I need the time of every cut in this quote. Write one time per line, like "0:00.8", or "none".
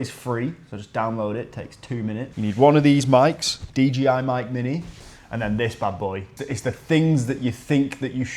0:05.0
0:06.3